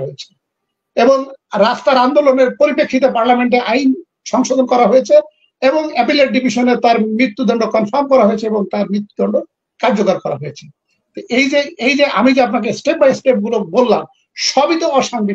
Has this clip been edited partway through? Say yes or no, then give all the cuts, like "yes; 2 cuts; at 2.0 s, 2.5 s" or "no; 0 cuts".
no; 0 cuts